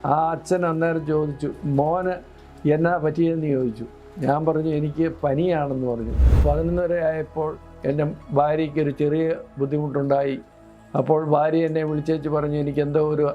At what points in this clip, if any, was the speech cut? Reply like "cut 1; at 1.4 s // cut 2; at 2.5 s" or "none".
cut 1; at 6.3 s